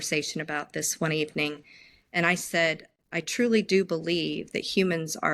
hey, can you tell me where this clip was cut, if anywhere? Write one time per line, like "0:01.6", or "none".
none